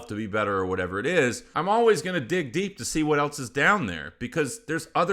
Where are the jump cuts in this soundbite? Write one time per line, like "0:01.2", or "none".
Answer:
0:01.5